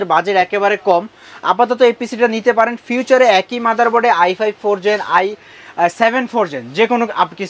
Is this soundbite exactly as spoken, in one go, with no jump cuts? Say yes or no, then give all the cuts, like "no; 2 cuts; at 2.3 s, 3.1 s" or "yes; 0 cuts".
yes; 0 cuts